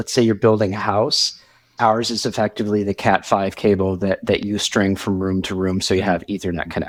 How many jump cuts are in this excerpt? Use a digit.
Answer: 0